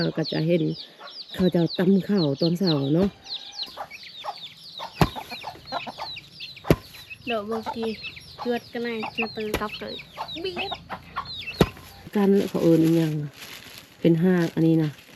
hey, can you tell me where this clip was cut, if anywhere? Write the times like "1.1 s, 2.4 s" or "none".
3.6 s, 12.1 s